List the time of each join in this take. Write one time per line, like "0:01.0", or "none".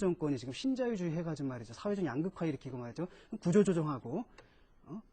0:02.3